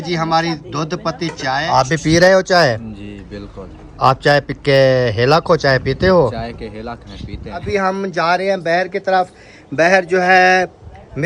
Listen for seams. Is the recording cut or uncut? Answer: cut